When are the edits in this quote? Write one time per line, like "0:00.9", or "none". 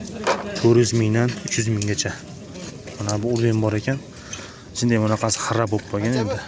none

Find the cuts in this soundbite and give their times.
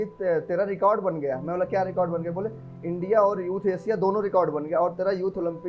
none

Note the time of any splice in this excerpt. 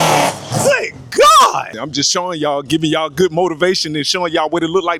none

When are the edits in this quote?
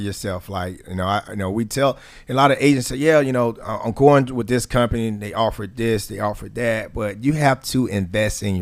none

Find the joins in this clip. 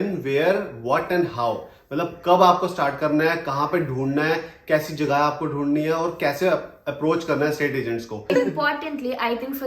0:08.3

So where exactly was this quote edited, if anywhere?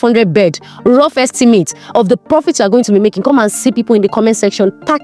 none

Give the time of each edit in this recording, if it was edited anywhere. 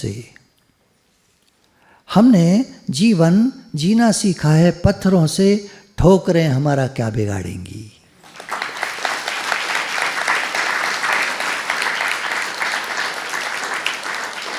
none

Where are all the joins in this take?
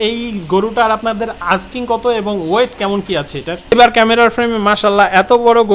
0:03.7

